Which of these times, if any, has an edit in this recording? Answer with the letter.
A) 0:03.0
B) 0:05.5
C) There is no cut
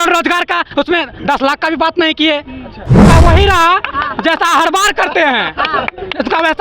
A